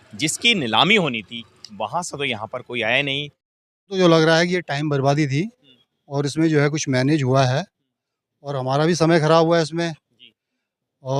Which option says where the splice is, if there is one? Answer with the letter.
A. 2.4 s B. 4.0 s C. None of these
B